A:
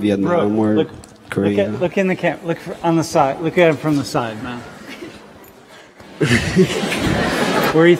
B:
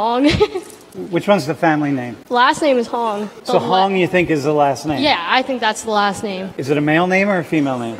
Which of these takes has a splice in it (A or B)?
B